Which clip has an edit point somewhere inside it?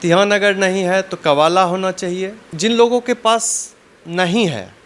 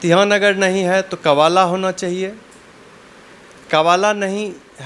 first; 1 cut; at 2.4 s

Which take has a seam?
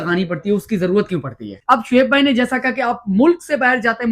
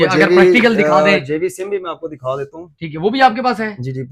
first; 1 cut; at 1.5 s

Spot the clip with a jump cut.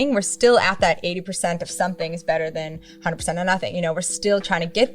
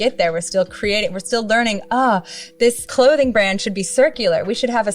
second; 1 cut; at 2.8 s

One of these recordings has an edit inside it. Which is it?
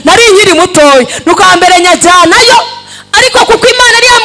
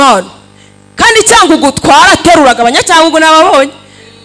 first; 1 cut; at 1.4 s

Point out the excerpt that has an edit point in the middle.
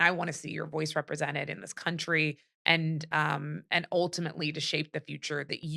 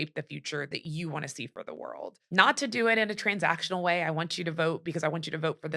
second; 1 cut; at 2.1 s

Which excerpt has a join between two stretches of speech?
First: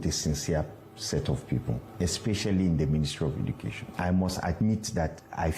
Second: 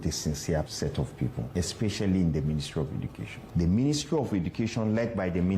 second; 2 cuts; at 1.1 s, 3.4 s

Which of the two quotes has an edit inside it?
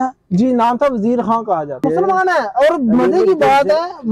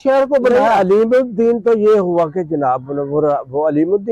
first; 1 cut; at 1.8 s

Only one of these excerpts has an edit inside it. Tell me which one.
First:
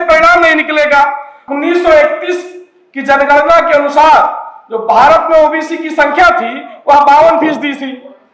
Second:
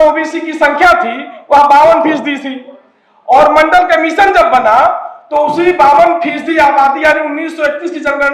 first; 1 cut; at 1.4 s

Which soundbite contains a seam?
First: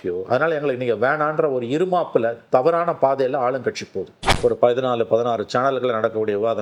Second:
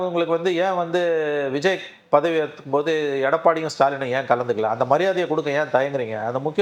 first; 1 cut; at 4.2 s

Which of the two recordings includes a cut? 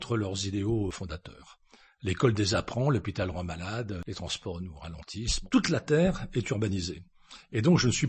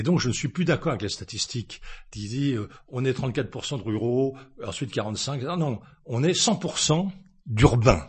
first; 3 cuts; at 1.0 s, 4.0 s, 5.4 s

